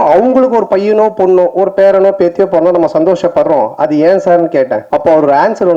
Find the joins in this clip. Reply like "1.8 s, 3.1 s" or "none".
4.8 s